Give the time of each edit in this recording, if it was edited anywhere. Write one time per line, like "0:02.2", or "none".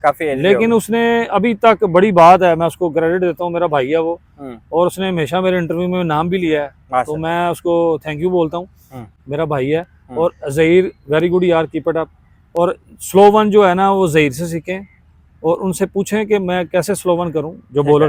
none